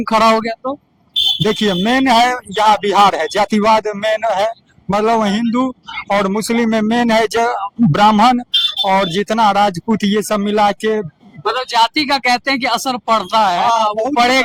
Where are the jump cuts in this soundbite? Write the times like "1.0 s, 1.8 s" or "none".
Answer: none